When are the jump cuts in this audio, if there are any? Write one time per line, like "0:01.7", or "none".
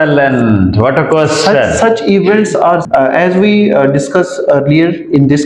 0:02.8